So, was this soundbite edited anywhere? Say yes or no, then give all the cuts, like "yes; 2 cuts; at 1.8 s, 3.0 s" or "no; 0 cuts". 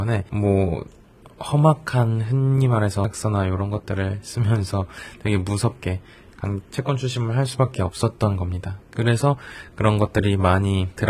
yes; 1 cut; at 3.0 s